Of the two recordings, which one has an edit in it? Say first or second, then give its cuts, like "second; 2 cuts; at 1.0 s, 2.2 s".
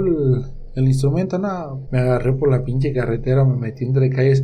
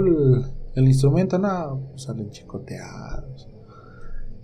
first; 1 cut; at 1.8 s